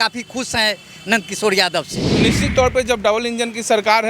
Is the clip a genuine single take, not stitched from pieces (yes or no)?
no